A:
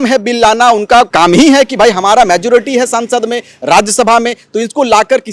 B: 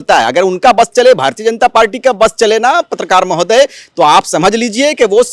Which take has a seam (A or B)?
A